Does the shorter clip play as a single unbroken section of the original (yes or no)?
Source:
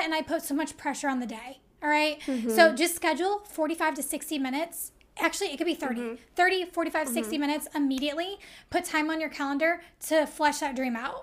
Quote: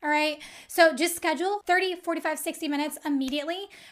no